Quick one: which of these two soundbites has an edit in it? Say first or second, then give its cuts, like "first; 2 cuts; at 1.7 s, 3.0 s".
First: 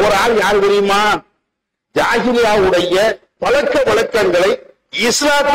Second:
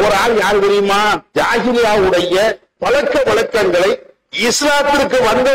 second; 1 cut; at 1.2 s